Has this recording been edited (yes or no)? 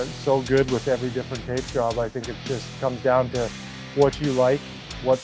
no